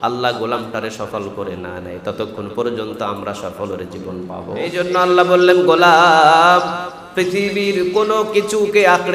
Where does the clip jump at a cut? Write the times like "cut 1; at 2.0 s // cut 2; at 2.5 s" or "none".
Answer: cut 1; at 4.7 s